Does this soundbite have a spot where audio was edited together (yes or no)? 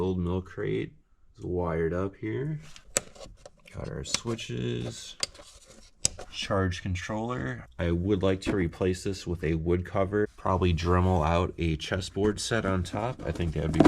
yes